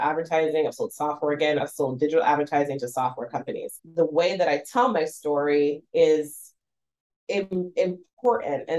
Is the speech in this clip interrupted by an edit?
yes; 2 cuts; at 1.6 s, 3.7 s

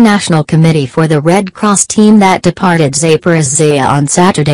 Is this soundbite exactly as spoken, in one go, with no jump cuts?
yes; 0 cuts

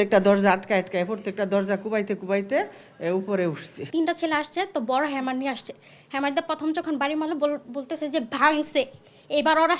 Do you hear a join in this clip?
no; 0 cuts

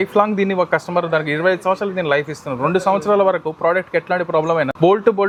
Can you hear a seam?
no; 0 cuts

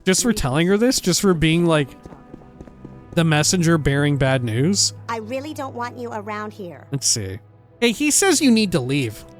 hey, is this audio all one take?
no; 2 cuts; at 6.8 s, 7.6 s

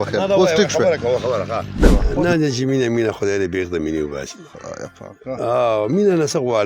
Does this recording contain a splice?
yes; 1 cut; at 1.9 s

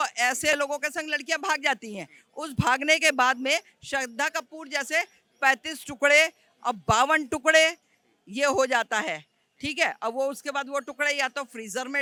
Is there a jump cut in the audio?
no; 0 cuts

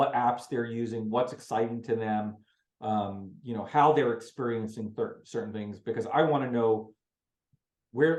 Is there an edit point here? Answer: no; 0 cuts

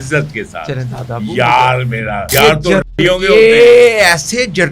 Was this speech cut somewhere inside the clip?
yes; 1 cut; at 2.3 s

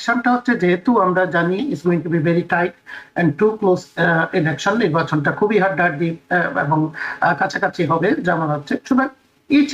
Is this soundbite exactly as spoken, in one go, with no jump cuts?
yes; 0 cuts

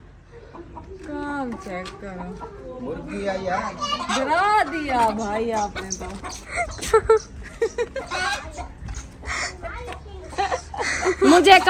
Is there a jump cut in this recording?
no; 0 cuts

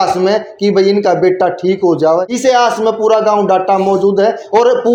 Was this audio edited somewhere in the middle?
no; 0 cuts

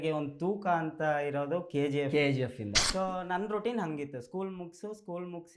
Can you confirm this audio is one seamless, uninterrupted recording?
no; 1 cut; at 2.7 s

